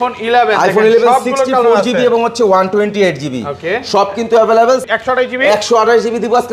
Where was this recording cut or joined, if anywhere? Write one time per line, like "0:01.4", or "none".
0:04.9